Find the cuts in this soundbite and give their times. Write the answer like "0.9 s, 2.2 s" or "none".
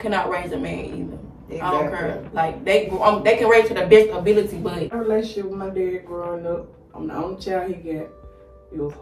4.9 s